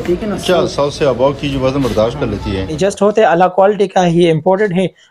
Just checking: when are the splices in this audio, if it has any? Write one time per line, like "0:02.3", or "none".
0:02.8